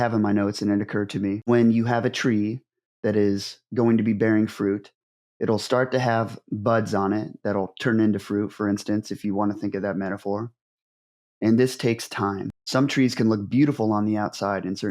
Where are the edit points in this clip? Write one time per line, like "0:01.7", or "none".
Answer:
0:12.5